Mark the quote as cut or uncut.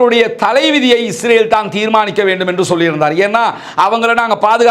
uncut